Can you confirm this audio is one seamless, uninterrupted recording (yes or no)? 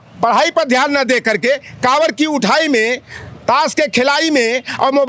yes